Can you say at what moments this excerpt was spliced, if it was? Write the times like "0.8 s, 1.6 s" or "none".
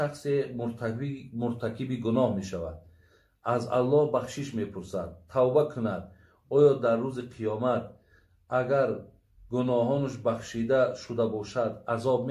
none